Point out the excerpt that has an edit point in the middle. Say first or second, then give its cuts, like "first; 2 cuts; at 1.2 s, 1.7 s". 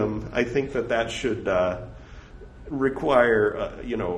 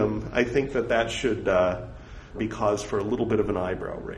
second; 1 cut; at 2.4 s